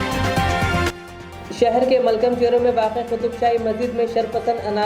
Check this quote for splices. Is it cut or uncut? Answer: uncut